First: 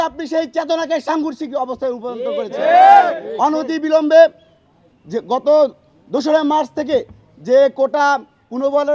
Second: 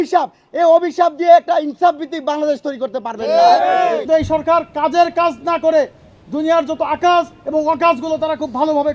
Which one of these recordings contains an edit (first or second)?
second